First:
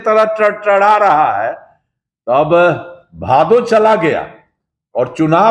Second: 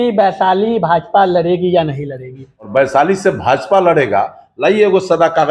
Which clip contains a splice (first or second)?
second